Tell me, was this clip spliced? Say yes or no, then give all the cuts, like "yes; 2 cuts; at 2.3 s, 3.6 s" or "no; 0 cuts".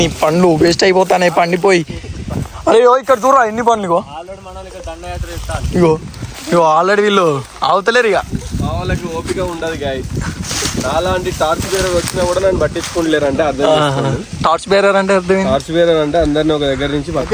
no; 0 cuts